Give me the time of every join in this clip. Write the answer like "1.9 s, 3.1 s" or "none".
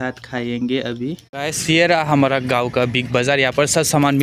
1.4 s